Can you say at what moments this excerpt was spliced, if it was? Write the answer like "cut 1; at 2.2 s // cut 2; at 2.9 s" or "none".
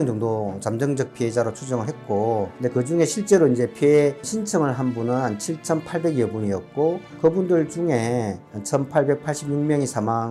none